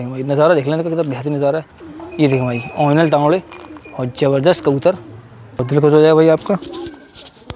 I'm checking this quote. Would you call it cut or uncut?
cut